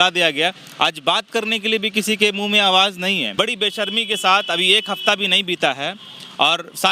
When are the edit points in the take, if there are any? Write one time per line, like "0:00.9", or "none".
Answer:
0:03.3